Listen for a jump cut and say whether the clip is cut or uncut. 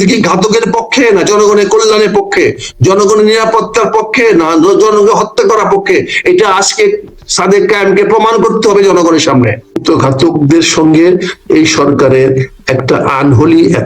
cut